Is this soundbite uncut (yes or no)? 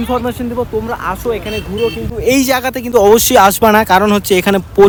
yes